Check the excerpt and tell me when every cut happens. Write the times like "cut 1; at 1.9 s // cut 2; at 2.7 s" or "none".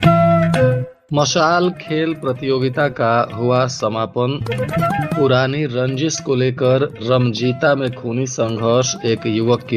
cut 1; at 0.9 s